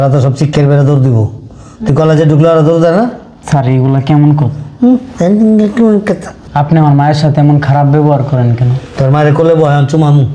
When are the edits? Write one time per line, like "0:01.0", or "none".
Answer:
0:03.3
0:06.3